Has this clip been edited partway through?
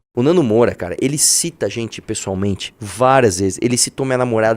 no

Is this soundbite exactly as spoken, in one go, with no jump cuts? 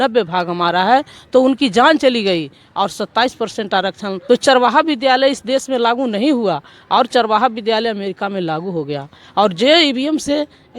no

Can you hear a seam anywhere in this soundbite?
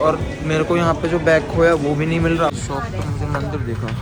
no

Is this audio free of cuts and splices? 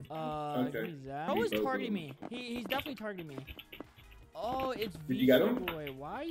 no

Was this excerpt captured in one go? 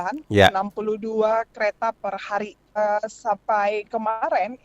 no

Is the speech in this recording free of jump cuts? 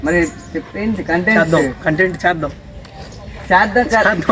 yes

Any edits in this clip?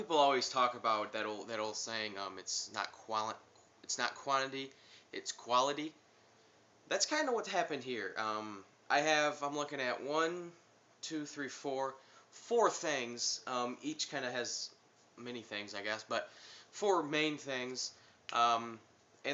yes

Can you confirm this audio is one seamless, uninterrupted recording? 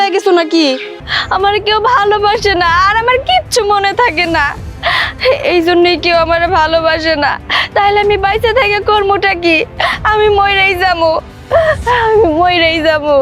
no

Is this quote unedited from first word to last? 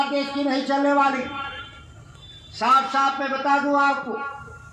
yes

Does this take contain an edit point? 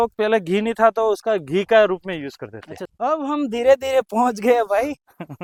no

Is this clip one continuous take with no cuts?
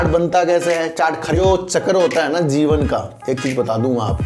no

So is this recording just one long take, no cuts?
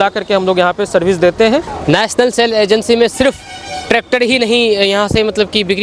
no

